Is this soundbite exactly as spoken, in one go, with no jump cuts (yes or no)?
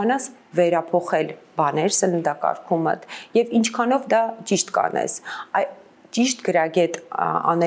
yes